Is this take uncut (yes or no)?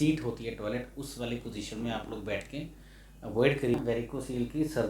no